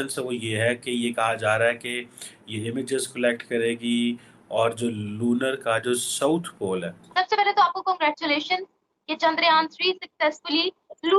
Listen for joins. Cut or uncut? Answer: cut